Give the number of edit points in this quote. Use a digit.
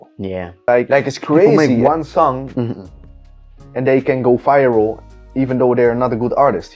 1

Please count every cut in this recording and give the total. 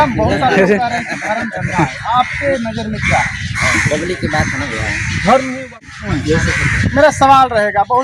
1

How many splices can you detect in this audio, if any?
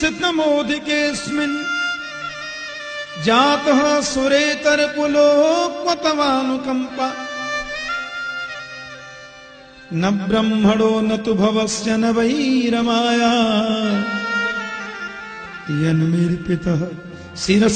0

